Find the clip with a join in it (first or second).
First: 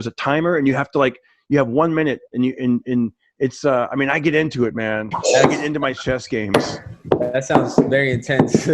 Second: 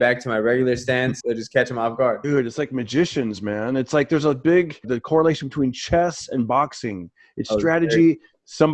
second